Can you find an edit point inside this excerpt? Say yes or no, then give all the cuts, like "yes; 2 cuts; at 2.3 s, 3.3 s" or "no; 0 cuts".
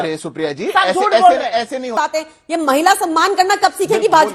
yes; 1 cut; at 1.9 s